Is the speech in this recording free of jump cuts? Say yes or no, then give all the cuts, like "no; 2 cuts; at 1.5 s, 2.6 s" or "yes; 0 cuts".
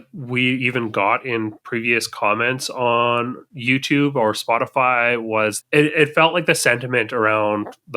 no; 1 cut; at 5.6 s